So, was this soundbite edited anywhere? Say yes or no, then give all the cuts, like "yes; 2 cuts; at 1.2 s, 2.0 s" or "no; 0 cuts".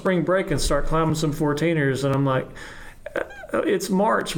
no; 0 cuts